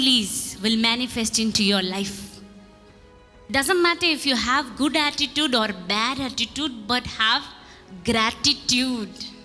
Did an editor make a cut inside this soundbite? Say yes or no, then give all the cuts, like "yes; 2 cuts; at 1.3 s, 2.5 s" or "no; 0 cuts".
yes; 1 cut; at 2.8 s